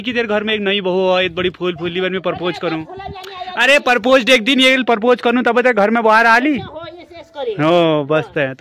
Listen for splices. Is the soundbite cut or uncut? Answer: uncut